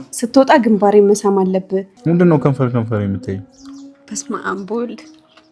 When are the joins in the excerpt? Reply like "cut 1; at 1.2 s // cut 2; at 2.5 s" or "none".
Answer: cut 1; at 1.9 s